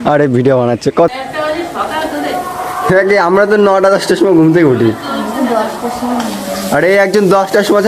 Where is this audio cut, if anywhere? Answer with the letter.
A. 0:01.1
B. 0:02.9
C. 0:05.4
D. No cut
A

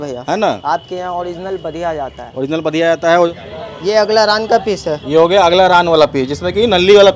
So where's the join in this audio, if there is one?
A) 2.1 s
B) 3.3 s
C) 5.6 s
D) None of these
B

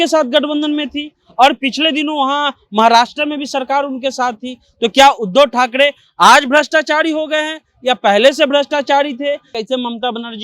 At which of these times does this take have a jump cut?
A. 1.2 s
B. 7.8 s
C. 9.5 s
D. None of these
C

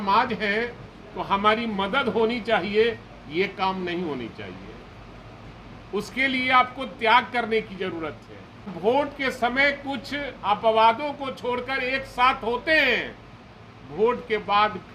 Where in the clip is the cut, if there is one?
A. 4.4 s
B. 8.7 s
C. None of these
B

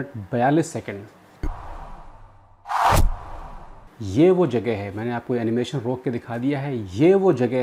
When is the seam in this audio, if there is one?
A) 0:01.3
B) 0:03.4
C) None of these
C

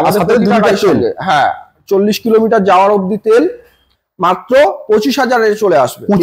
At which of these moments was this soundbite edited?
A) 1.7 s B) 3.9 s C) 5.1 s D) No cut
B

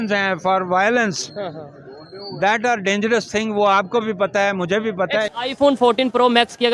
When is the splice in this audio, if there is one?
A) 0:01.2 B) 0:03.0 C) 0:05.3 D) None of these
C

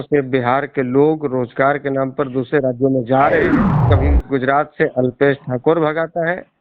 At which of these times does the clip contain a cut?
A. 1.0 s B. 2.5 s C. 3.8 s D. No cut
C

